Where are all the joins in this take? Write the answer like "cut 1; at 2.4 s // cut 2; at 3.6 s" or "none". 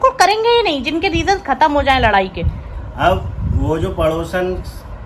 none